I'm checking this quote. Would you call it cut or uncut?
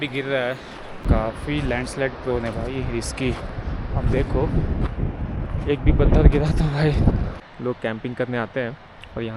cut